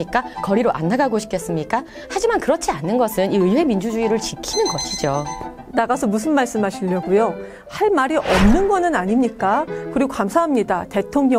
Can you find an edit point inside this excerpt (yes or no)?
no